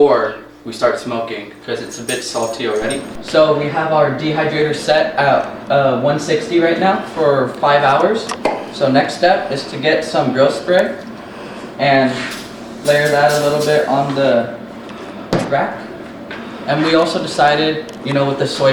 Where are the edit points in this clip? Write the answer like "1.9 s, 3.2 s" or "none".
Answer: 3.1 s